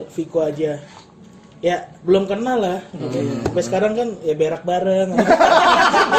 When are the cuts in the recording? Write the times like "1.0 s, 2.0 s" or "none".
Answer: none